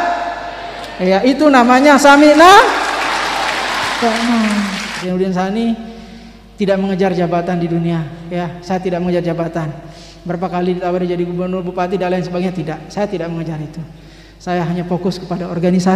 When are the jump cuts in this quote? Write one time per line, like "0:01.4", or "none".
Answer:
0:04.9